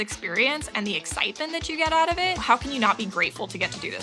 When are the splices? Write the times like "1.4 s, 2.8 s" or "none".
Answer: 2.4 s